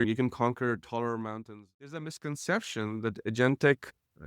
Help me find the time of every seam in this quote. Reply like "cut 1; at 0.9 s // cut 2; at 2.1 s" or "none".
cut 1; at 1.4 s